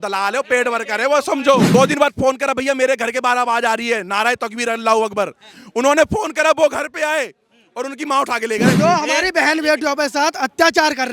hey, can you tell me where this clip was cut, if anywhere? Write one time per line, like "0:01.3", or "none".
0:01.7
0:08.8